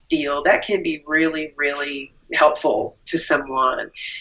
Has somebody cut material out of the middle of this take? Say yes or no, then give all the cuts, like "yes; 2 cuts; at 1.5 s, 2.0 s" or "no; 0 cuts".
no; 0 cuts